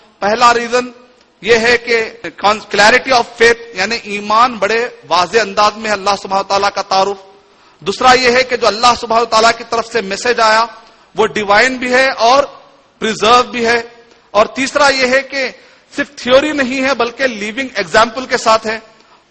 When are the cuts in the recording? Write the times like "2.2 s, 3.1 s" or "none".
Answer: 2.2 s